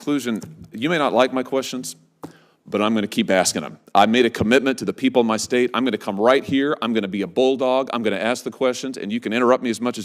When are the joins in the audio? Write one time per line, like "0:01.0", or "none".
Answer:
none